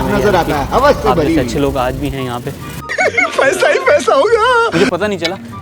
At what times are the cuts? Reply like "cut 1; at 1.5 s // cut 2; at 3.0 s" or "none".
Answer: cut 1; at 2.8 s